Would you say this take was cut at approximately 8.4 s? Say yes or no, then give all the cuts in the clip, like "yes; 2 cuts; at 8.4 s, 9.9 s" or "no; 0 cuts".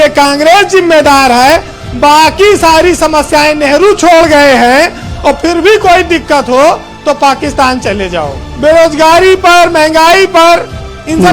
yes; 1 cut; at 8.4 s